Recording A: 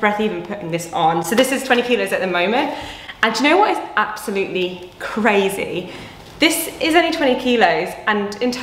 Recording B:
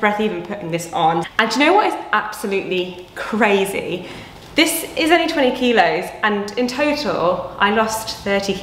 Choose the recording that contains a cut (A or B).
B